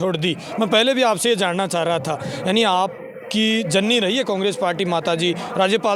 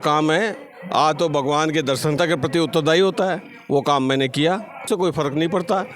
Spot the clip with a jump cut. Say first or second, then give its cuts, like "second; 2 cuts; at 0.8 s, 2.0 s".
second; 2 cuts; at 2.2 s, 4.9 s